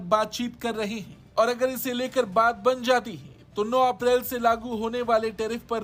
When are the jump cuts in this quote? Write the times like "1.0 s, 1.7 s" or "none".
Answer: none